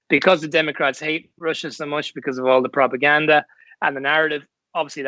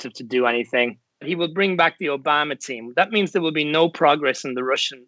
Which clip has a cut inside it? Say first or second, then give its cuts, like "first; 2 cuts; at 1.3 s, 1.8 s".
second; 1 cut; at 1.3 s